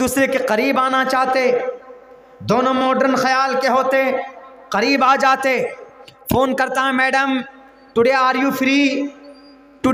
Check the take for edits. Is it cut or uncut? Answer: uncut